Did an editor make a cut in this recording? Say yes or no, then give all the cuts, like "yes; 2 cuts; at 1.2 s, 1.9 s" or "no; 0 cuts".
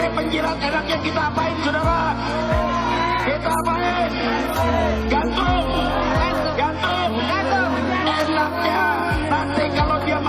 no; 0 cuts